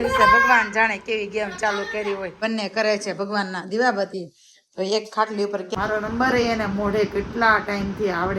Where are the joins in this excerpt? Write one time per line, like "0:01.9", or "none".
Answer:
0:02.4
0:05.7